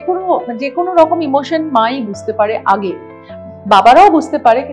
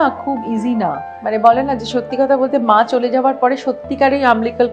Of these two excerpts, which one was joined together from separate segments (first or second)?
second